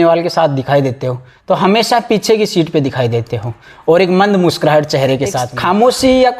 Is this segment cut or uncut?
cut